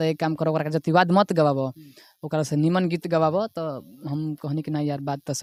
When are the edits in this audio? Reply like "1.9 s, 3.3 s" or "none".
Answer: none

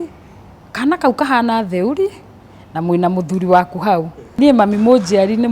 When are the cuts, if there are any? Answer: 4.2 s

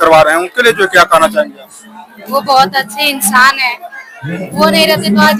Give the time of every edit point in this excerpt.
none

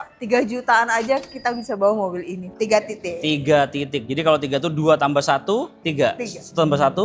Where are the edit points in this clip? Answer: 2.5 s, 5.8 s

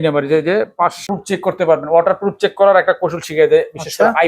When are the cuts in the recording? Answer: 1.1 s

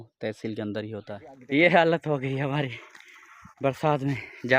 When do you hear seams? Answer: 1.3 s

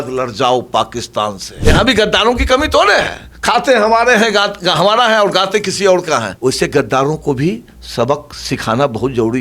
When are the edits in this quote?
1.5 s, 6.3 s

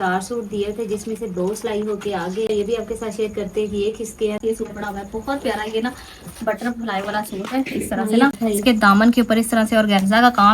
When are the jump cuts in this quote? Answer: 2.5 s, 4.4 s, 8.3 s

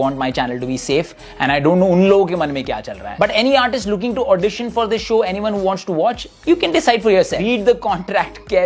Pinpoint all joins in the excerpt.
6.6 s

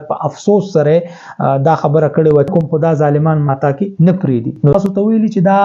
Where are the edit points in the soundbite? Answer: 2.5 s, 4.7 s

